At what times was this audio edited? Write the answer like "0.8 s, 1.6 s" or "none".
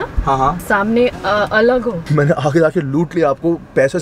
2.1 s